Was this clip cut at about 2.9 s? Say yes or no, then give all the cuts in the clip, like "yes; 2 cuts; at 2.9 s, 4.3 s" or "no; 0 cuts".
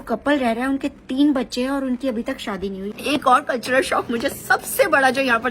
yes; 1 cut; at 2.9 s